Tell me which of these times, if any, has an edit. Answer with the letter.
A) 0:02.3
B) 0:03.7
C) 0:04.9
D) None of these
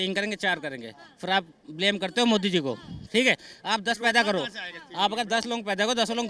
D